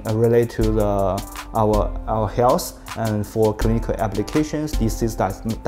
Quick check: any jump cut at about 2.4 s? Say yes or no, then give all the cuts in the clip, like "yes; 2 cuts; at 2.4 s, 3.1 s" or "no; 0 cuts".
no; 0 cuts